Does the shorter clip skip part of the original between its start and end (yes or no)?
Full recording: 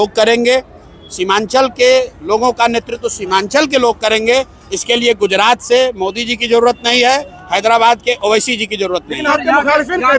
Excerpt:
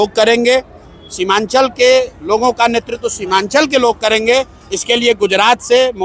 no